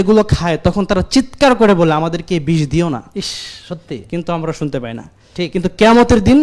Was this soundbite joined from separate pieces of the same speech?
no; 0 cuts

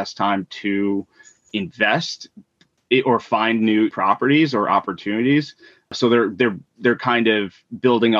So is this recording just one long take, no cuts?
no; 2 cuts; at 3.9 s, 5.9 s

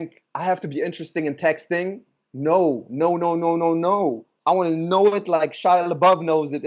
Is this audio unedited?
yes; 0 cuts

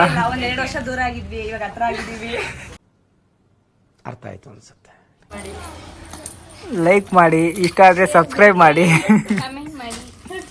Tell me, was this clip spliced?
yes; 2 cuts; at 2.8 s, 5.4 s

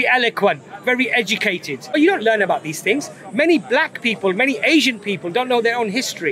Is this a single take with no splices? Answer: no; 1 cut; at 1.8 s

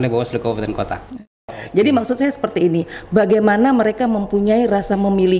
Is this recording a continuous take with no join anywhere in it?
no; 1 cut; at 1.2 s

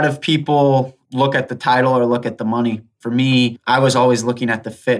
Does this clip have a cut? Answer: yes; 2 cuts; at 1.0 s, 3.1 s

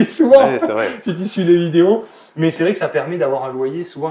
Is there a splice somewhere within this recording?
no; 0 cuts

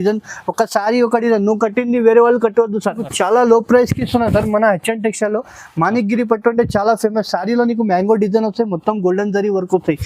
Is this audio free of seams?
no; 1 cut; at 3.0 s

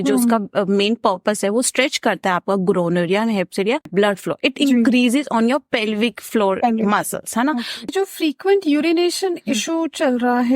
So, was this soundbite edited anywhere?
yes; 2 cuts; at 3.9 s, 7.9 s

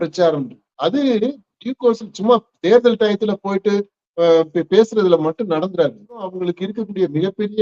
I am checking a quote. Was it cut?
yes; 1 cut; at 6.4 s

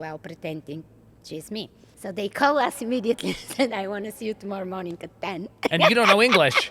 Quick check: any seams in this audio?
yes; 1 cut; at 1.8 s

